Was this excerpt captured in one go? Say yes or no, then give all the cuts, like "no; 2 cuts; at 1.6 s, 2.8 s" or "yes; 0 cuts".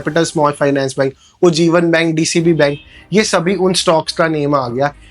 yes; 0 cuts